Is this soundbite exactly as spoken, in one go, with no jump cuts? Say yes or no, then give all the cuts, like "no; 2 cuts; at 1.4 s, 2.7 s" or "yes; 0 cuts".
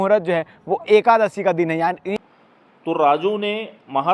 no; 1 cut; at 2.2 s